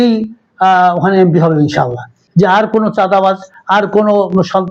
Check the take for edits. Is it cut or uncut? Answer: cut